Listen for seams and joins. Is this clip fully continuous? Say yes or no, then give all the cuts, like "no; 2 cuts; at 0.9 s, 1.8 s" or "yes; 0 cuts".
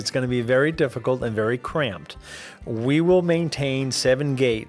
yes; 0 cuts